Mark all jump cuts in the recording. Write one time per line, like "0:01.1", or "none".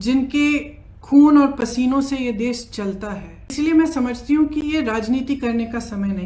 0:03.5